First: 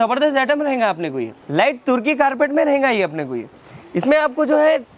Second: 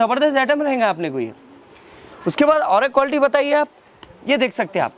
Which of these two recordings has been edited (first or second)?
first